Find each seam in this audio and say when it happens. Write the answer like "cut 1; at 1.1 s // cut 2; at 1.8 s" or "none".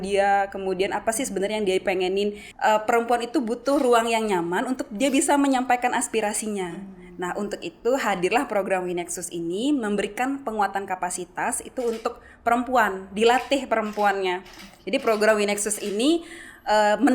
cut 1; at 2.4 s